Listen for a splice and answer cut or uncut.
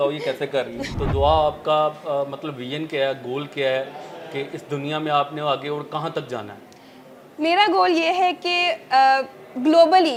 uncut